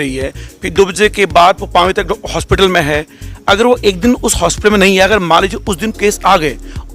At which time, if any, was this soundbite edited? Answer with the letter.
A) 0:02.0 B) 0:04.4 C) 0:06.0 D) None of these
D